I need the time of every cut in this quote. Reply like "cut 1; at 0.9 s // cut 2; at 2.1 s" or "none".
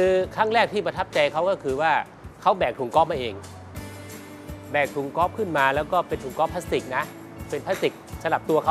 none